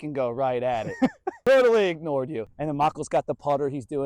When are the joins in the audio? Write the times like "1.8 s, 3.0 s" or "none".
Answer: 0.9 s, 2.4 s